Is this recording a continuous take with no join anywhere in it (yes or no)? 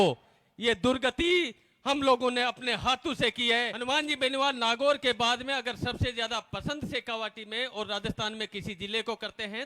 no